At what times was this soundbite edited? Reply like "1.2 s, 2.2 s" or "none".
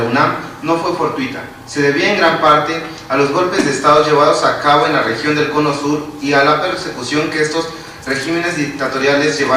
8.2 s